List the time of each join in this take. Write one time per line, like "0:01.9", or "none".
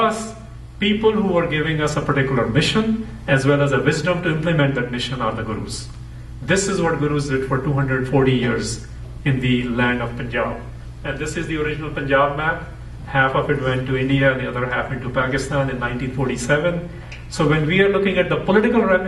none